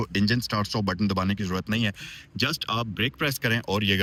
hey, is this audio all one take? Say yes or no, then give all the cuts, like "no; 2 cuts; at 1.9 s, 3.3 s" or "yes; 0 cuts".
yes; 0 cuts